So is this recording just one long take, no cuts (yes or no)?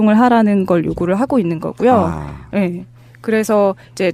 yes